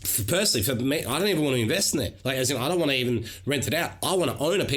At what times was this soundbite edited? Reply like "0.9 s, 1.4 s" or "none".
none